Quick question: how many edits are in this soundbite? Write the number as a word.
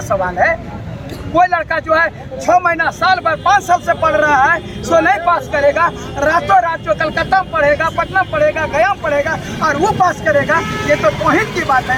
zero